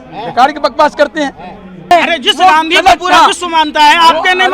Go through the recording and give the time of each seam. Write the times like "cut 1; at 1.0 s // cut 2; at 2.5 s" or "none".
cut 1; at 1.9 s